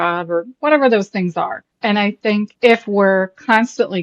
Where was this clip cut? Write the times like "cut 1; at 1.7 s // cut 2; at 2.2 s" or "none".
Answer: cut 1; at 1.7 s // cut 2; at 2.5 s